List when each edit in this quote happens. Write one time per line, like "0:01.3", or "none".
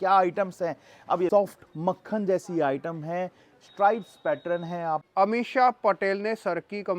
0:01.3
0:05.1